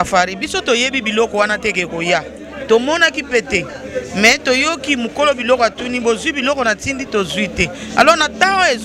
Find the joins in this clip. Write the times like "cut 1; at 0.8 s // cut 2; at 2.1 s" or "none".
none